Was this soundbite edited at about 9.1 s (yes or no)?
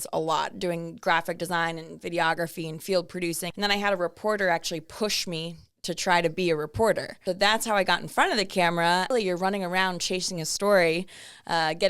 yes